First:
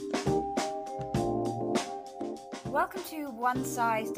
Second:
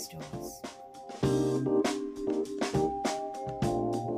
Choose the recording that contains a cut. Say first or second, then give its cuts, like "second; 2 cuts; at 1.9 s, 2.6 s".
first; 1 cut; at 2.6 s